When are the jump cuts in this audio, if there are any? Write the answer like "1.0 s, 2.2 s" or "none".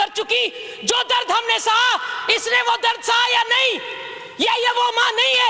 none